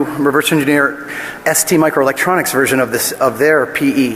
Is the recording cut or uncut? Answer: cut